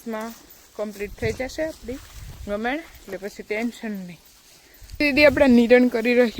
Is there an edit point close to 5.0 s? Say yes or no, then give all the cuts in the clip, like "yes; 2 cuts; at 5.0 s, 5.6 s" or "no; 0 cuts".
yes; 1 cut; at 5.0 s